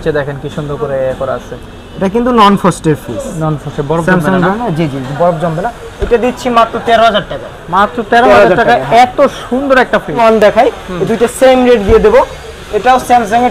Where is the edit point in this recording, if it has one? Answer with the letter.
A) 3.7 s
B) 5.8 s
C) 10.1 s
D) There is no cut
C